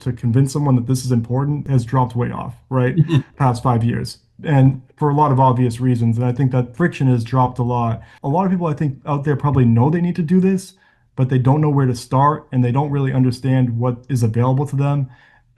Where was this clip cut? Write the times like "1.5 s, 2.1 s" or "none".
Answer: 1.6 s, 3.3 s, 6.7 s, 8.1 s